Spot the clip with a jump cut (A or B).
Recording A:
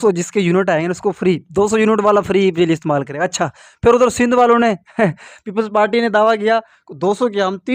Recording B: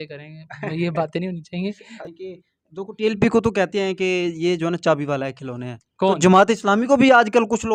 B